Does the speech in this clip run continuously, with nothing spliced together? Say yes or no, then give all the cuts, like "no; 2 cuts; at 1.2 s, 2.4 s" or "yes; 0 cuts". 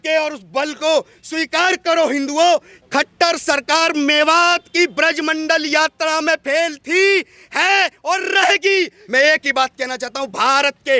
no; 2 cuts; at 2.8 s, 9.0 s